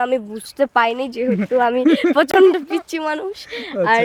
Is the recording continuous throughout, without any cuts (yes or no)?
yes